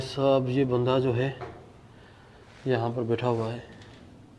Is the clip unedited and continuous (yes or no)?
yes